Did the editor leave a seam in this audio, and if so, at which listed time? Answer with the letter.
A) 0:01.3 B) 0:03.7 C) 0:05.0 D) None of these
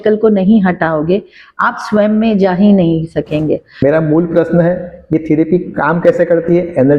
B